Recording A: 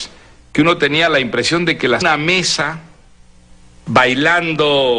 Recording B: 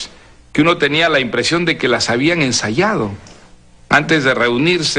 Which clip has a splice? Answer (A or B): B